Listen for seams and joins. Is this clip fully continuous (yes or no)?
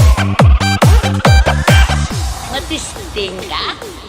no